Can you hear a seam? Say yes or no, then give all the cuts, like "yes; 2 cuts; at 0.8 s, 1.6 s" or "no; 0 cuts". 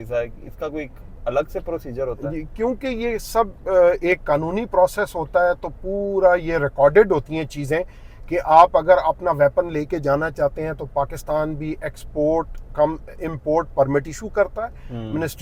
no; 0 cuts